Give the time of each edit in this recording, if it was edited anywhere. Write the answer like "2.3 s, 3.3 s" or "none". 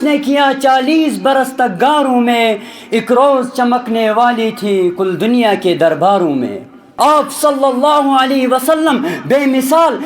6.9 s